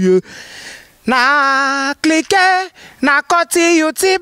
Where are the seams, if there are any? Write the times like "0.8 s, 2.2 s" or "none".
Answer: none